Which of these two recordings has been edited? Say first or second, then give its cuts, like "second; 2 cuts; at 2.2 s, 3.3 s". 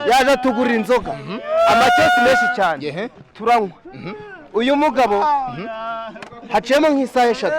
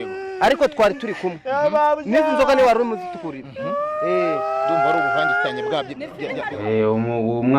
second; 1 cut; at 6.5 s